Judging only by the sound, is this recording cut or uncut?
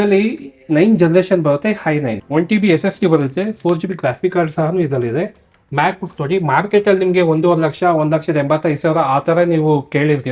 uncut